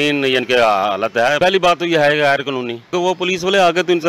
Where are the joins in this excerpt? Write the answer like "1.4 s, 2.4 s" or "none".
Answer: 1.4 s, 2.9 s